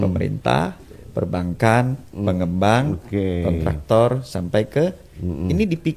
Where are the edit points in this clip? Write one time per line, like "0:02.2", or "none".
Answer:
none